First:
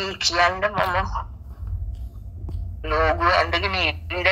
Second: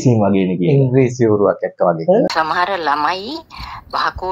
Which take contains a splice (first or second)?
second